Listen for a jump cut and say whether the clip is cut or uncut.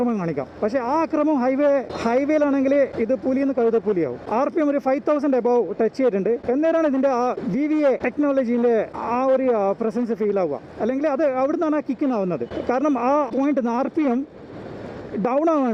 uncut